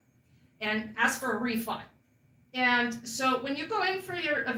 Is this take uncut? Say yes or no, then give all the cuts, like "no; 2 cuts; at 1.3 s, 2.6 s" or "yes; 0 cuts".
yes; 0 cuts